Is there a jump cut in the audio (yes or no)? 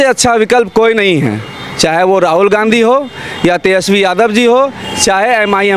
no